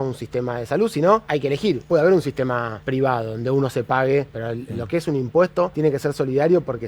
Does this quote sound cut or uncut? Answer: cut